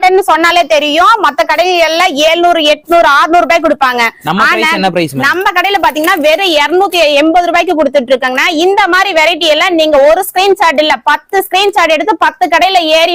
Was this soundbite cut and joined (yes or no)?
no